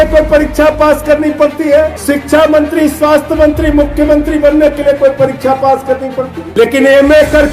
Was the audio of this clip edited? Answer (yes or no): yes